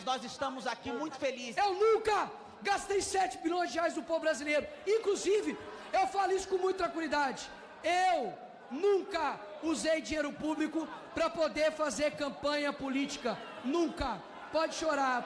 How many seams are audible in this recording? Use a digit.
1